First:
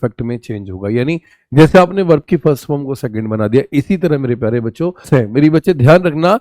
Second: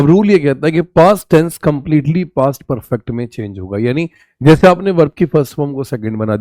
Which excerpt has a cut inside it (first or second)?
first